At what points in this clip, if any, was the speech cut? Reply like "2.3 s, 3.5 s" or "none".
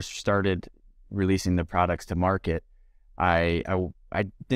none